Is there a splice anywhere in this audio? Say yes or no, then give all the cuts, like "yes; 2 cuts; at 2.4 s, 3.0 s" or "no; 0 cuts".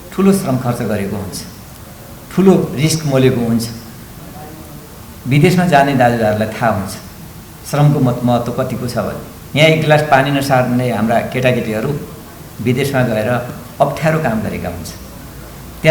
no; 0 cuts